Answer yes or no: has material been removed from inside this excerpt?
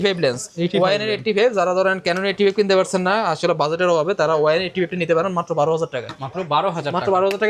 no